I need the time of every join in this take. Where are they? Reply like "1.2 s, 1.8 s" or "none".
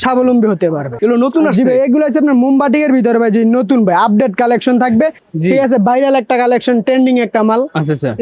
0.9 s, 5.2 s